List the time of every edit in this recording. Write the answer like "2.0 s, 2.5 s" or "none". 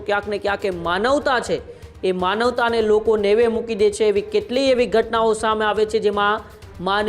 none